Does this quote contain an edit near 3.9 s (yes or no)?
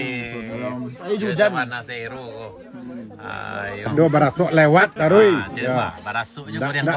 yes